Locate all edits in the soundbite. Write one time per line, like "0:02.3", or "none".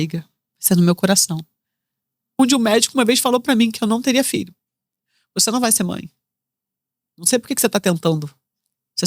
0:02.4